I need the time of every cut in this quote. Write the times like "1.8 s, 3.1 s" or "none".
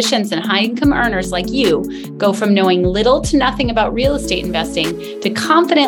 none